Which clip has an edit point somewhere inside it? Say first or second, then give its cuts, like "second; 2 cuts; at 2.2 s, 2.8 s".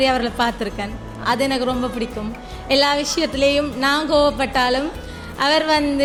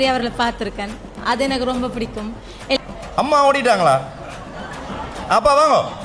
second; 1 cut; at 2.8 s